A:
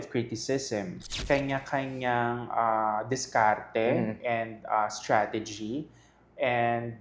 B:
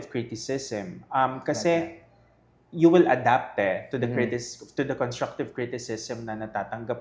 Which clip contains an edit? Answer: A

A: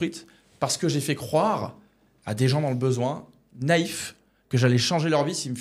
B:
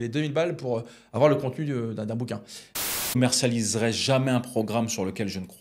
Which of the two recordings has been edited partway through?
B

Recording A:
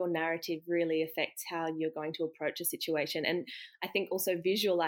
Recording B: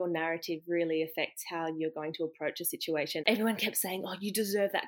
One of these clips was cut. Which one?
B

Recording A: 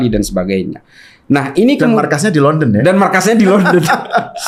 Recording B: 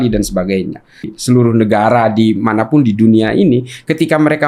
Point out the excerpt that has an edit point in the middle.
B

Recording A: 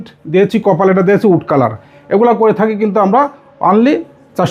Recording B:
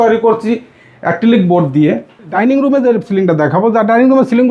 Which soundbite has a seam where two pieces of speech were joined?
B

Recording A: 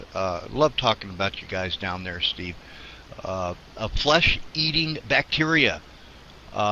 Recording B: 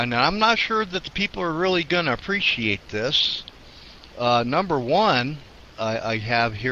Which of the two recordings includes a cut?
B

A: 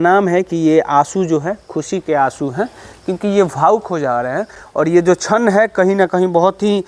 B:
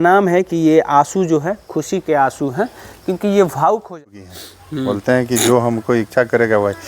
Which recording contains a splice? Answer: B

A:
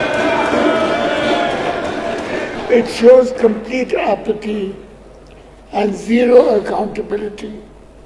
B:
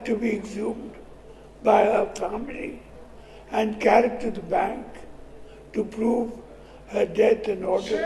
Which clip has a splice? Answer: A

